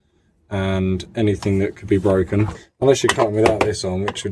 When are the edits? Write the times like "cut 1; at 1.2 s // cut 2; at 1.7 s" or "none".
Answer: cut 1; at 2.6 s